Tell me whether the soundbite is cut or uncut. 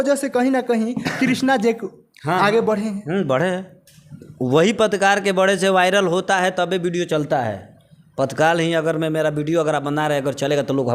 uncut